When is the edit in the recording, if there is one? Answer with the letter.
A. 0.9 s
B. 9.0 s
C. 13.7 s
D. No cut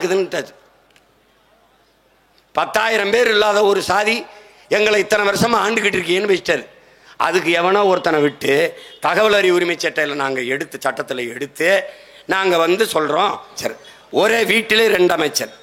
C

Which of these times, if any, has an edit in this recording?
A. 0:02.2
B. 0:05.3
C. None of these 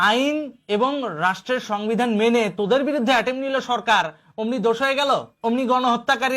B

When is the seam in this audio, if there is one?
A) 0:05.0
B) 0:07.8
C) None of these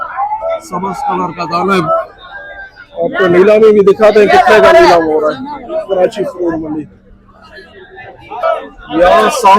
C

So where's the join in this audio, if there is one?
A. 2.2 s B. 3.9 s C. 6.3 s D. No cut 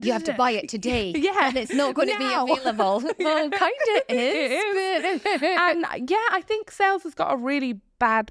D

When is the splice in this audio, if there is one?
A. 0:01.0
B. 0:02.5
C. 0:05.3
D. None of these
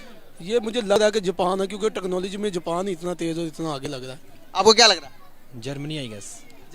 A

